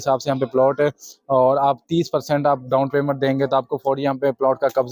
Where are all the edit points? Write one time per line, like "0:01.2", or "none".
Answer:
none